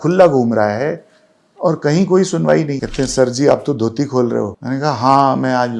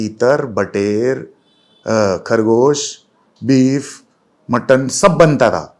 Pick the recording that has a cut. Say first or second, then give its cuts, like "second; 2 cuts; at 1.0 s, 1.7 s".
first; 2 cuts; at 2.8 s, 4.6 s